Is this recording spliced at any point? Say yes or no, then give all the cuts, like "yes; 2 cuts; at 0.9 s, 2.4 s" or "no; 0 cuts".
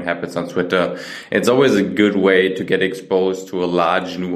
no; 0 cuts